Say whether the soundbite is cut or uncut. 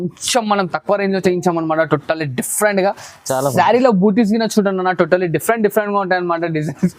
uncut